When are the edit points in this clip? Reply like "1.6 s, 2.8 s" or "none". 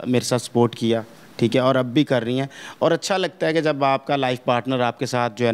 none